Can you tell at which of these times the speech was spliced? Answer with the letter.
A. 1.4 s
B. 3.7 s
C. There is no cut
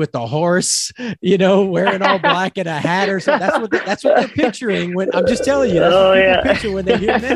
C